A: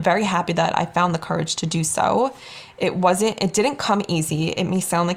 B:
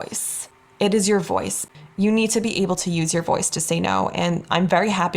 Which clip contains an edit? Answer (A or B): B